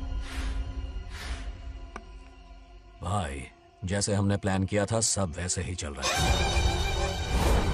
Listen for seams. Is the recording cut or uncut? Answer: uncut